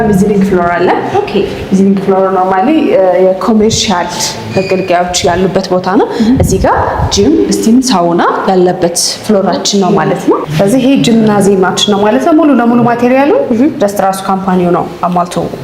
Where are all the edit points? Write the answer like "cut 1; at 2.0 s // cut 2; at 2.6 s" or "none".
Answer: cut 1; at 10.5 s